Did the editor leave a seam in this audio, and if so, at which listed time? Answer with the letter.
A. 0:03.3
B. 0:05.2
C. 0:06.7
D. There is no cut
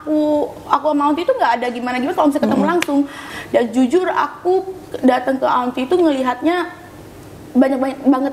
A